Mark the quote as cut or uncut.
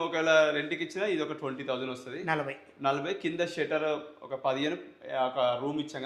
uncut